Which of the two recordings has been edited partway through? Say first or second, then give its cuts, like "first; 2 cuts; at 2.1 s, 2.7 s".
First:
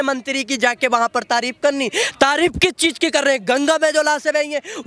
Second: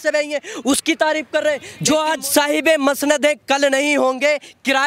second; 1 cut; at 1.7 s